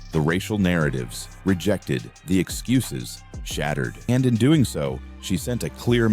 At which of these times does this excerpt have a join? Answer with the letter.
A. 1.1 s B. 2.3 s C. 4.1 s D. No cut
C